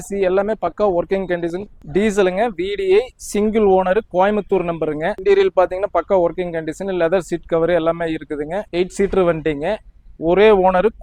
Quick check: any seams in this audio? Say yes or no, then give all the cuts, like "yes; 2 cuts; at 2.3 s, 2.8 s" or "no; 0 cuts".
yes; 2 cuts; at 1.8 s, 8.6 s